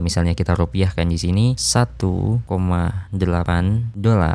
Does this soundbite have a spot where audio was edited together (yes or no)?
yes